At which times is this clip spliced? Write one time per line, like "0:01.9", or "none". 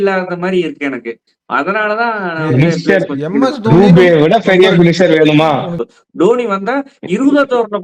0:05.7